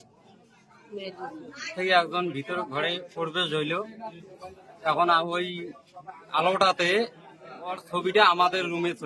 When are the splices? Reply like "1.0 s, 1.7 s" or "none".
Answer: 1.7 s

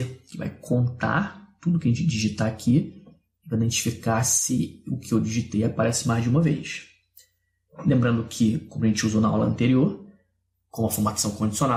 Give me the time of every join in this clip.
none

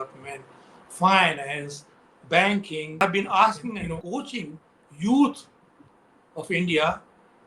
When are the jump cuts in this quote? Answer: 3.0 s

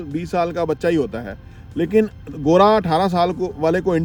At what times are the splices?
none

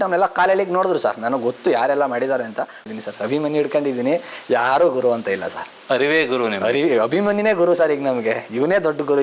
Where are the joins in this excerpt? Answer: 2.8 s

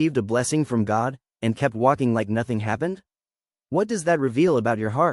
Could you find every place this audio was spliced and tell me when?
none

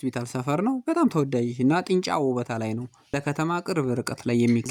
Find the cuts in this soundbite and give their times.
none

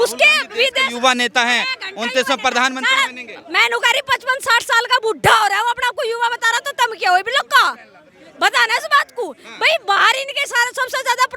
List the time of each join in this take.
none

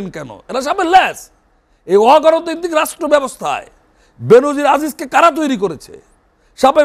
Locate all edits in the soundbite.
none

